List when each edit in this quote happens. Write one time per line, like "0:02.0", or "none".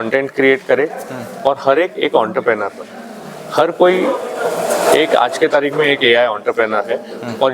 none